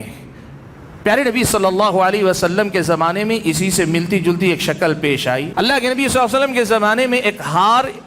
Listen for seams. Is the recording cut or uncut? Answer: cut